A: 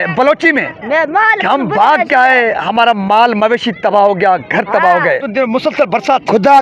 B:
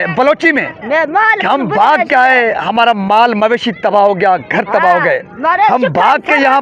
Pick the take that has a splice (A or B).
A